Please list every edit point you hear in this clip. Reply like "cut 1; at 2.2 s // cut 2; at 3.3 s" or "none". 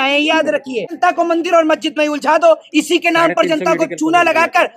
cut 1; at 1.0 s